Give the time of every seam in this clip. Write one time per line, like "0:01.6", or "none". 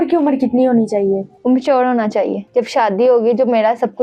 0:02.4